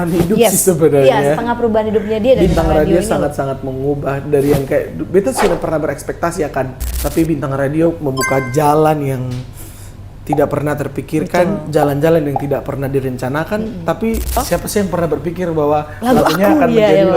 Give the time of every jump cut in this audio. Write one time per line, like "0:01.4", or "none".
0:06.8
0:14.4